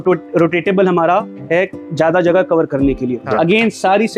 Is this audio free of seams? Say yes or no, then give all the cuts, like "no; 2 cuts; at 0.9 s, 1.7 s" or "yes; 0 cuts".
no; 1 cut; at 3.2 s